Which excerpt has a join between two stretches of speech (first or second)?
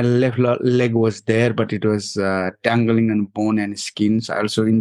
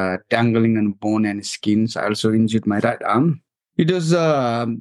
second